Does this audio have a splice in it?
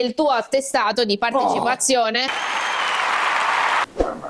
no; 0 cuts

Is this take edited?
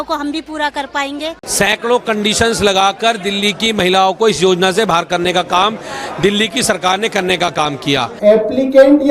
yes; 2 cuts; at 1.4 s, 8.1 s

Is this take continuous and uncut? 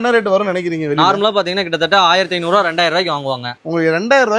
yes; 0 cuts

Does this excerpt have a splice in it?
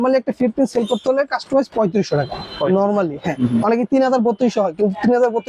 no; 0 cuts

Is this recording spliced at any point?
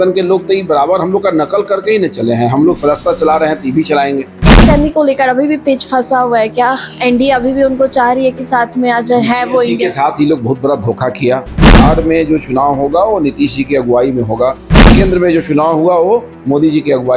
yes; 3 cuts; at 4.5 s, 11.8 s, 14.9 s

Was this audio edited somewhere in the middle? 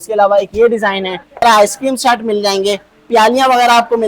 yes; 1 cut; at 1.4 s

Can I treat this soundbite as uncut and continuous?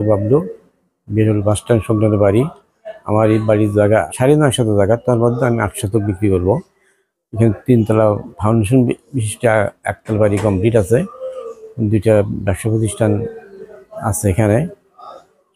no; 1 cut; at 4.1 s

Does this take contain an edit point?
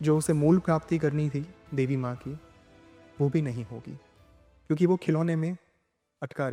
no; 0 cuts

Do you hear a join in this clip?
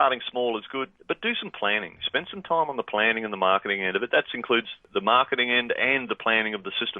yes; 2 cuts; at 0.9 s, 4.9 s

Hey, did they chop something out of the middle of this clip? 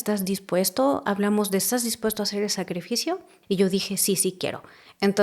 yes; 1 cut; at 3.3 s

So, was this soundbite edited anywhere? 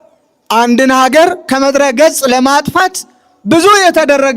yes; 1 cut; at 1.4 s

